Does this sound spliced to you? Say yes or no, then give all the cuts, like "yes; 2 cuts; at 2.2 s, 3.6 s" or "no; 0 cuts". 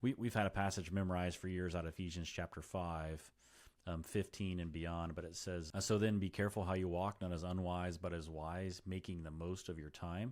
yes; 1 cut; at 5.7 s